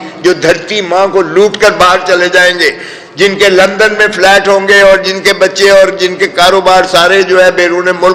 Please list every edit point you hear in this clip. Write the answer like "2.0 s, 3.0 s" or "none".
none